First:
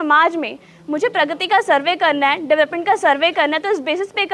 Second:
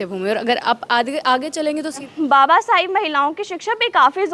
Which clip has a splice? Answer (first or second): second